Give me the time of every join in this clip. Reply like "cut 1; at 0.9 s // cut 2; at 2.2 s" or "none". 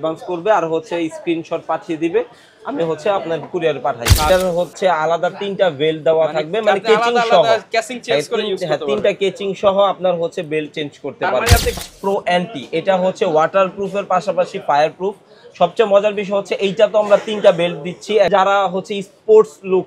cut 1; at 4.3 s // cut 2; at 11.8 s // cut 3; at 18.3 s